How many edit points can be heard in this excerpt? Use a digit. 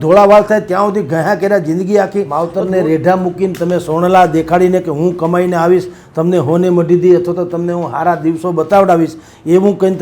1